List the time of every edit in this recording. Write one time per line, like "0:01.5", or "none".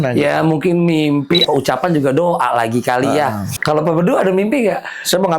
0:01.4
0:03.5